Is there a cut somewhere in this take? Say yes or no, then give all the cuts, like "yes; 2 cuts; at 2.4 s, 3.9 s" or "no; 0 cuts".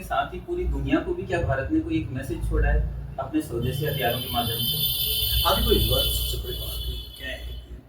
no; 0 cuts